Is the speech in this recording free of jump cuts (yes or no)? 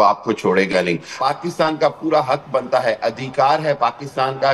no